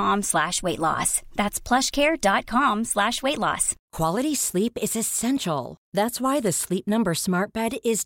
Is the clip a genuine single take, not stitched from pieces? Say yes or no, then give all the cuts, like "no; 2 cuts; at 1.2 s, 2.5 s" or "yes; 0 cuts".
yes; 0 cuts